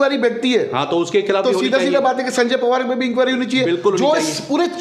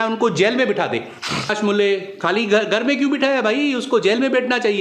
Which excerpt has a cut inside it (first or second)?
second